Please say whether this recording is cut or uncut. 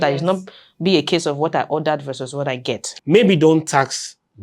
cut